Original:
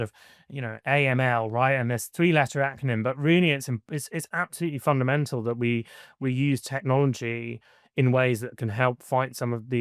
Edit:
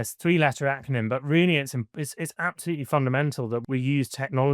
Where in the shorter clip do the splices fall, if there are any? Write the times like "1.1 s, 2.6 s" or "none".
3.6 s